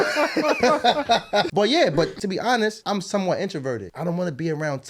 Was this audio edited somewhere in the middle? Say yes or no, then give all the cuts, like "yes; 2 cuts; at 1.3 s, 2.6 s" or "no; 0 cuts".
yes; 3 cuts; at 1.5 s, 2.6 s, 3.9 s